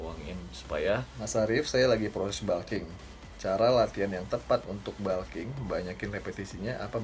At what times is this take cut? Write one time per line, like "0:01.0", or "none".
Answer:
0:01.2